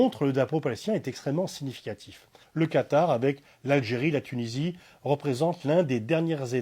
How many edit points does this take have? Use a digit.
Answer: 1